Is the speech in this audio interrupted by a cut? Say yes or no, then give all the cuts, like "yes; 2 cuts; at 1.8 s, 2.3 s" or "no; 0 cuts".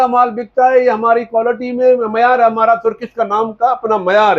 no; 0 cuts